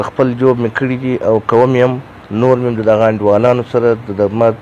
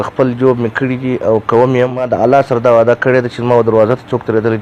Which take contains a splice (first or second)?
second